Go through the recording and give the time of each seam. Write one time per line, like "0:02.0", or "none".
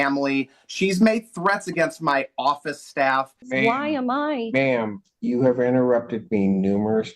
0:03.5